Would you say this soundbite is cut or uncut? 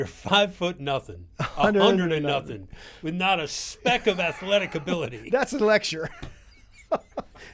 uncut